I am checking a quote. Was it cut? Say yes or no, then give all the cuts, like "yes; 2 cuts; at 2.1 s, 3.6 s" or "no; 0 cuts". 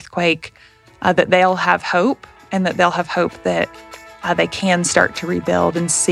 no; 0 cuts